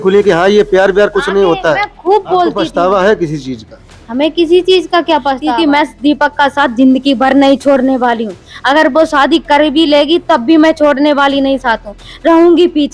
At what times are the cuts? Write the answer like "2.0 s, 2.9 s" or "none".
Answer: 2.6 s, 5.4 s